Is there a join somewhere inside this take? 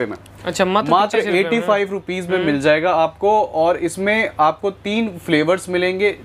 no; 0 cuts

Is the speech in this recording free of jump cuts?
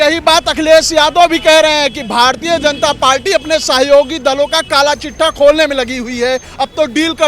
yes; 0 cuts

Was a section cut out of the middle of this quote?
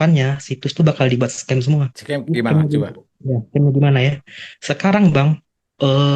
no; 0 cuts

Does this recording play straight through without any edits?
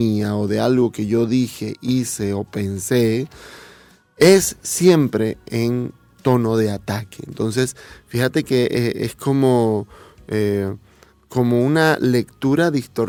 yes; 0 cuts

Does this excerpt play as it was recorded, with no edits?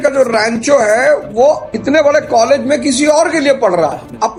yes; 0 cuts

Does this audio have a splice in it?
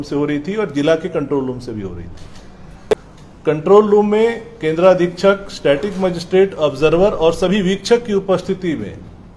no; 0 cuts

